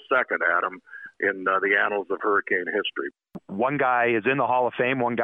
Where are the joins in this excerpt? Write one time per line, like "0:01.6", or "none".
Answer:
0:03.1